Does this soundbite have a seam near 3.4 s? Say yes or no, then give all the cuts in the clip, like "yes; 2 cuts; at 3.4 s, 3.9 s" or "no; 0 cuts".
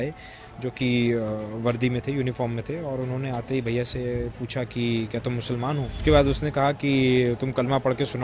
no; 1 cut; at 5.9 s